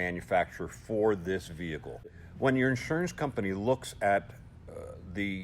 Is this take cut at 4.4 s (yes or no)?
no